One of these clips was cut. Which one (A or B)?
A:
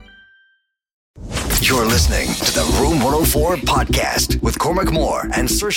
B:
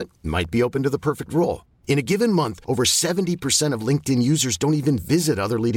A